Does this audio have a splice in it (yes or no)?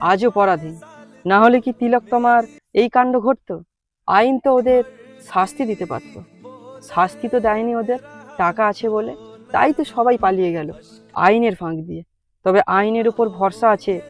no